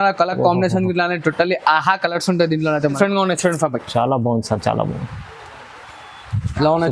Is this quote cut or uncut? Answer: cut